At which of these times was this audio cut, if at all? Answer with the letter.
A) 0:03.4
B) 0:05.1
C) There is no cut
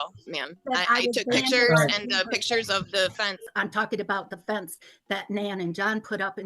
A